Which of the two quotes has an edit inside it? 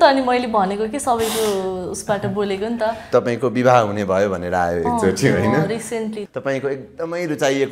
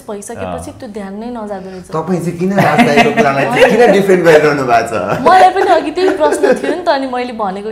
first; 2 cuts; at 3.0 s, 6.2 s

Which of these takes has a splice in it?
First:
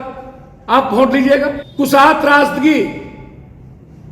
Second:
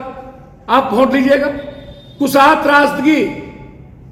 first; 1 cut; at 1.6 s

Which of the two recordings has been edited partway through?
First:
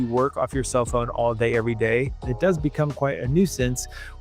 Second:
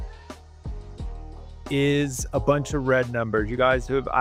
first; 1 cut; at 2.2 s

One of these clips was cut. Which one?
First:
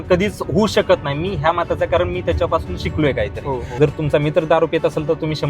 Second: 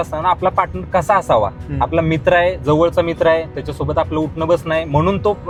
first; 1 cut; at 3.7 s

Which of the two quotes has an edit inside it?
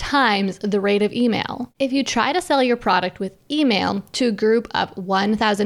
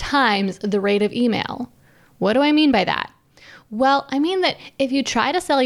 first; 1 cut; at 1.6 s

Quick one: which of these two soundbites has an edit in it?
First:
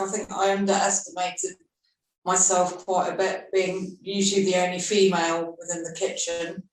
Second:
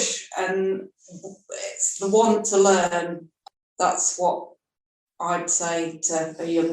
second; 1 cut; at 3.3 s

